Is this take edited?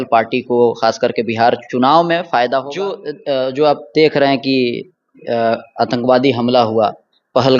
yes; 1 cut; at 3.1 s

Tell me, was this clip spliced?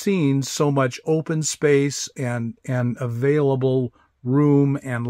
no; 0 cuts

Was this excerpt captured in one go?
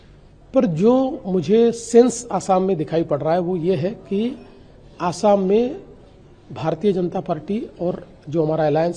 yes; 0 cuts

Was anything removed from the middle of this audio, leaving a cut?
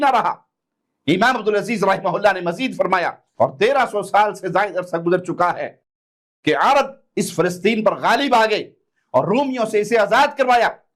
yes; 1 cut; at 3.2 s

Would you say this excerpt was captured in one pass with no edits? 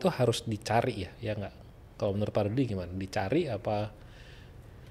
yes; 0 cuts

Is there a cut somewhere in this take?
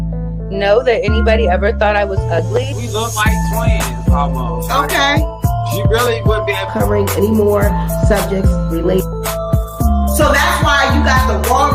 no; 0 cuts

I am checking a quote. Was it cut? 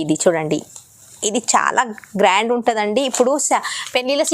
no; 0 cuts

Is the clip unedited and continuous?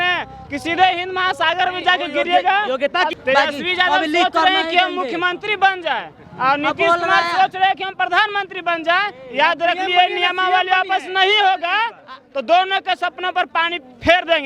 no; 1 cut; at 3.2 s

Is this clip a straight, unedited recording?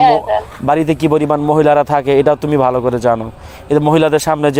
yes; 0 cuts

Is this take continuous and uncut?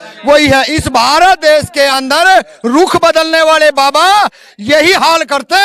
yes; 0 cuts

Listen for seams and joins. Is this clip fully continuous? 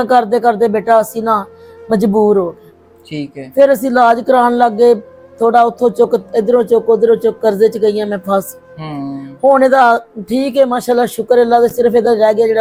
yes; 0 cuts

